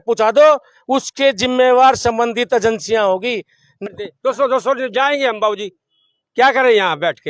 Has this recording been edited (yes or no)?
yes